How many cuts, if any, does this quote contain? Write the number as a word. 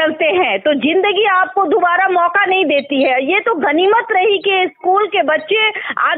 zero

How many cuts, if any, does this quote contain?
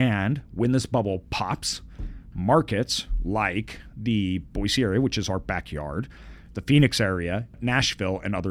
one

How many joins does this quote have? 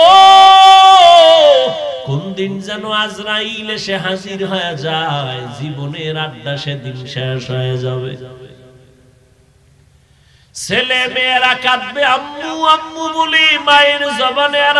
one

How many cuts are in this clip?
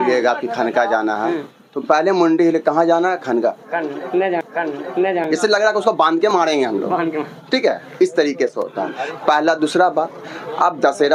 zero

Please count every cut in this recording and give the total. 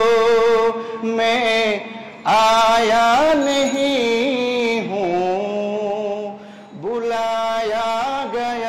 zero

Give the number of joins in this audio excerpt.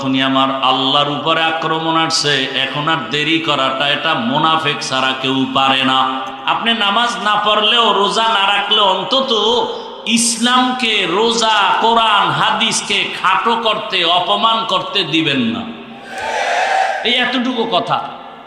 one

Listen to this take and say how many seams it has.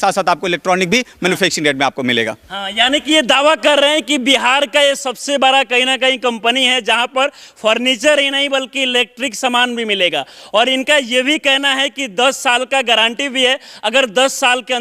zero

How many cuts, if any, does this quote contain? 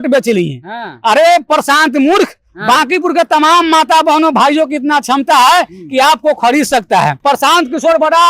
one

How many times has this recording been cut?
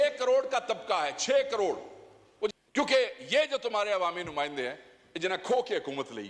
one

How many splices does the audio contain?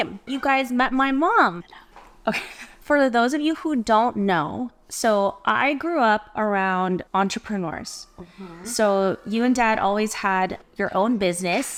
zero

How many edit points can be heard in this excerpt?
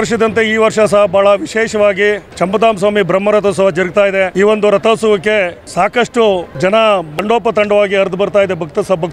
five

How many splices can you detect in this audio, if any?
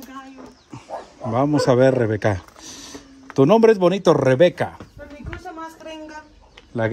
zero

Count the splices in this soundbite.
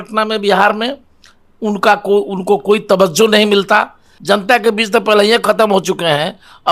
one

